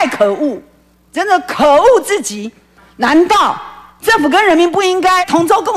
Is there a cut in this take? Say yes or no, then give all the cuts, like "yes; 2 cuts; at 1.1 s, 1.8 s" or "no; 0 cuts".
yes; 1 cut; at 2.8 s